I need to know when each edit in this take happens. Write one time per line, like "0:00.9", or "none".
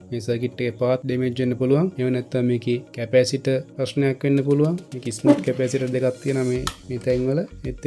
0:01.0
0:01.9
0:02.9
0:03.8